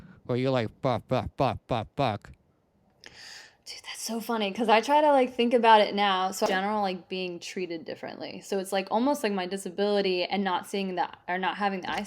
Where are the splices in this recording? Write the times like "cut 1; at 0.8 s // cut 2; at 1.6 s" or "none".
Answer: cut 1; at 6.5 s